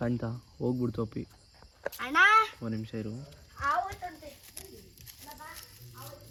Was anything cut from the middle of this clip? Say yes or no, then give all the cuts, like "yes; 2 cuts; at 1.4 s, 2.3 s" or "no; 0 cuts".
no; 0 cuts